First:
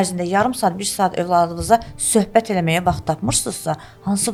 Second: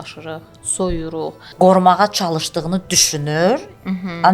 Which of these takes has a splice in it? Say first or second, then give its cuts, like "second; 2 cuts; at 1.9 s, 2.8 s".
second; 1 cut; at 1.4 s